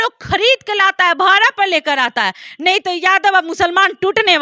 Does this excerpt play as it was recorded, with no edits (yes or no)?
yes